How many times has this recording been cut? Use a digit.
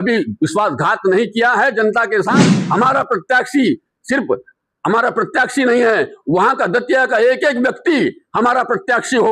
1